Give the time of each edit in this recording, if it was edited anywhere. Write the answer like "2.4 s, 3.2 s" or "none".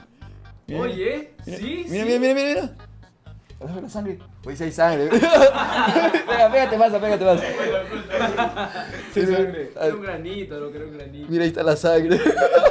none